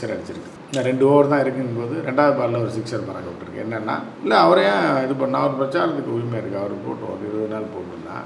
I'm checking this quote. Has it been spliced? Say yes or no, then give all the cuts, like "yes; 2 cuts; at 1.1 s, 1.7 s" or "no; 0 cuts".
no; 0 cuts